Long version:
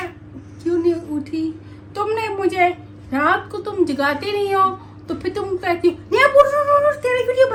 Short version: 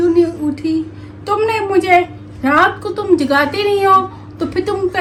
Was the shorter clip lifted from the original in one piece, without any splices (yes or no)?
yes